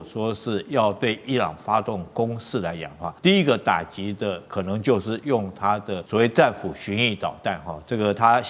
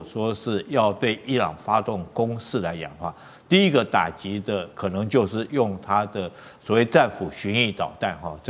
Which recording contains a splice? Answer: first; 2 cuts; at 3.0 s, 6.0 s

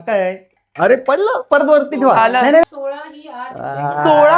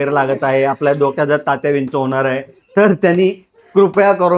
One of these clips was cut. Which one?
first; 1 cut; at 2.6 s

